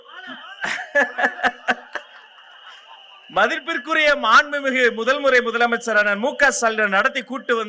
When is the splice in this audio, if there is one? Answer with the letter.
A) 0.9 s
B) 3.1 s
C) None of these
C